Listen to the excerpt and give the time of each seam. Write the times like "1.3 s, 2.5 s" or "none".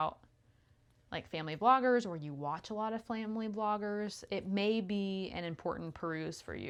none